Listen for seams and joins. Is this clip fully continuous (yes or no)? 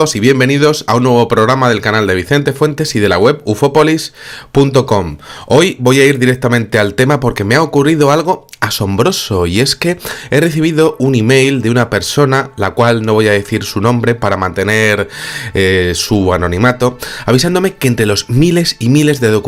yes